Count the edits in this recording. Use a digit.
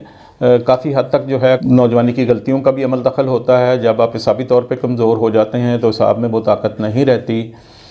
1